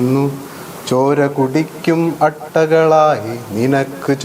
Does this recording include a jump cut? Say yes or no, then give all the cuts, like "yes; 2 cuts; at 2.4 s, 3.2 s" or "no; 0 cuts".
no; 0 cuts